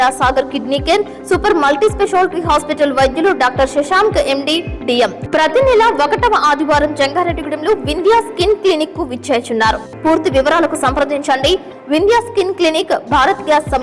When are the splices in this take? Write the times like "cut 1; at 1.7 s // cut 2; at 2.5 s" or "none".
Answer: cut 1; at 5.2 s // cut 2; at 9.9 s